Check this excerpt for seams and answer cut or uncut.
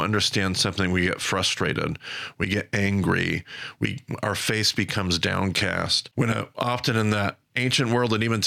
cut